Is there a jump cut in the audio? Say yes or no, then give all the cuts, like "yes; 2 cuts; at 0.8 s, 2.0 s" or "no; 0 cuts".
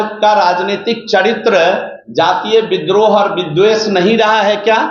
no; 0 cuts